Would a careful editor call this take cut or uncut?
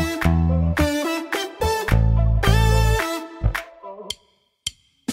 uncut